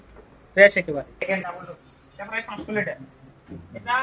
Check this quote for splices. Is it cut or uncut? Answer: cut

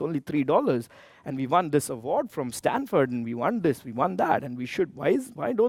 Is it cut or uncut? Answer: uncut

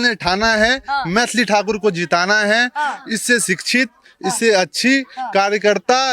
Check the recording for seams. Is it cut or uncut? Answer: uncut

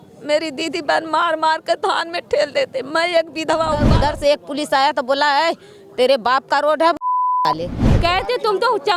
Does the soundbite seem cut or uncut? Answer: cut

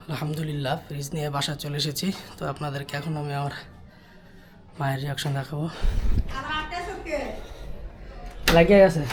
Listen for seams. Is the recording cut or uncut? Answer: uncut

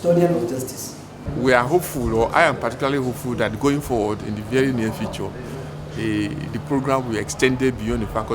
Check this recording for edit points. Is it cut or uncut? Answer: cut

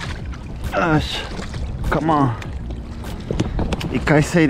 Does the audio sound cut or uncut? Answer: uncut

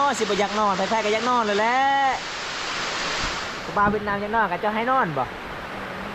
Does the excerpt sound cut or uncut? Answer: uncut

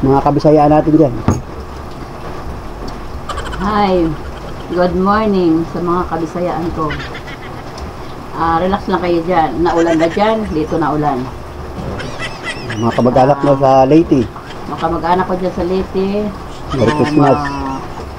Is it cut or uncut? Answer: uncut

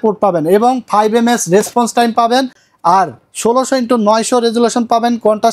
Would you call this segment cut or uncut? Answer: uncut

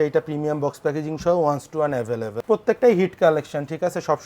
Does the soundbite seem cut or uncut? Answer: cut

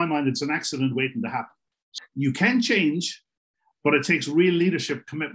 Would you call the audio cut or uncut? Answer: cut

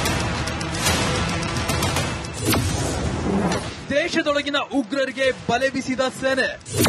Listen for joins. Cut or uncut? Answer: cut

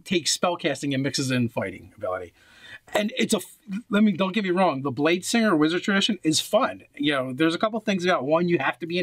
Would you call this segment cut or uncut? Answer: uncut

